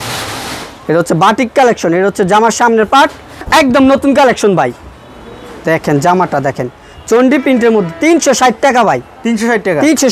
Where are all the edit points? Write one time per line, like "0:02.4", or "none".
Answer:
0:03.5